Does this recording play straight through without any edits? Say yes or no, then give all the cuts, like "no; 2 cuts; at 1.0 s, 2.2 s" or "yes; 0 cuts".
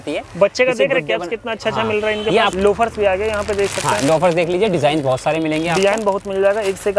no; 1 cut; at 2.5 s